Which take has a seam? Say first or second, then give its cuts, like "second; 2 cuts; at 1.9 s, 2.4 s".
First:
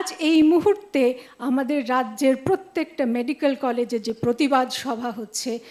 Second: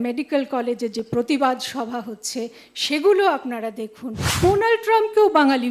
second; 1 cut; at 4.3 s